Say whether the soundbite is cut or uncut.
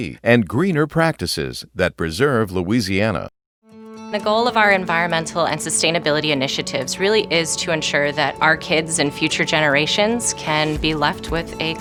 uncut